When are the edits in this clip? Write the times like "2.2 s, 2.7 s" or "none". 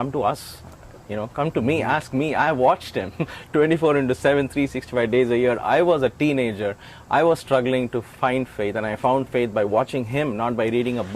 none